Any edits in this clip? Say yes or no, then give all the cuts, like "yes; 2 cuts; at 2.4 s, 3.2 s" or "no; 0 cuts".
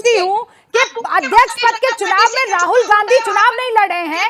no; 0 cuts